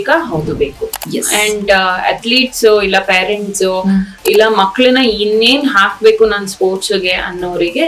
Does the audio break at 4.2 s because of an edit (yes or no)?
no